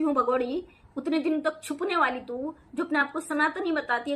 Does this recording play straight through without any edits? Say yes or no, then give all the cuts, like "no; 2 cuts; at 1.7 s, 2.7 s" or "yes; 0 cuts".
yes; 0 cuts